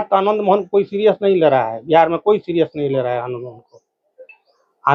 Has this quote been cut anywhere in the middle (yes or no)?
no